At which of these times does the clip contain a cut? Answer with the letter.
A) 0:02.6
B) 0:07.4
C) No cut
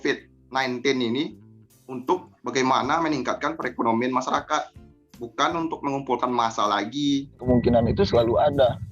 B